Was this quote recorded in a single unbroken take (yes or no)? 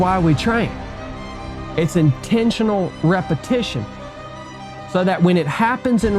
no